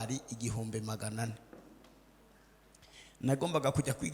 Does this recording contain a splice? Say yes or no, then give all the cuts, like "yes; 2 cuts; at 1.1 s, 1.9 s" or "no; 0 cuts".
no; 0 cuts